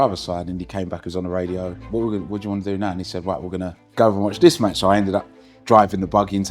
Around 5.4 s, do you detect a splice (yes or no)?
no